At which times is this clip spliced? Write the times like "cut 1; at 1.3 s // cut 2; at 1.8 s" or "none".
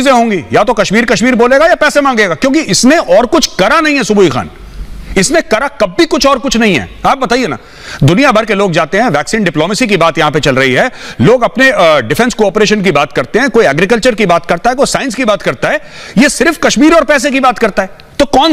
none